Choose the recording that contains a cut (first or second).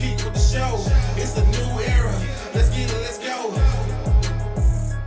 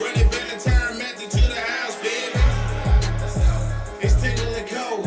first